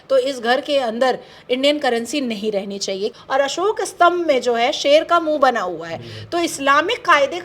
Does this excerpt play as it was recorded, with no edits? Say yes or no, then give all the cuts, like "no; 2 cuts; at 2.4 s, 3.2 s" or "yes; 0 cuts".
no; 1 cut; at 3.2 s